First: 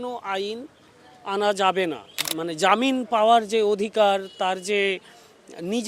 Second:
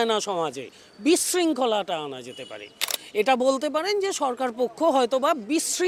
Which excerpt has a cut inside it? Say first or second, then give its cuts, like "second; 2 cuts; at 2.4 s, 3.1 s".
first; 1 cut; at 2.1 s